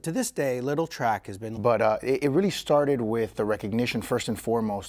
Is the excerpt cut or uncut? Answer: uncut